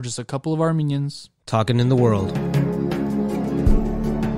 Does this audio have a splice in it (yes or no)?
yes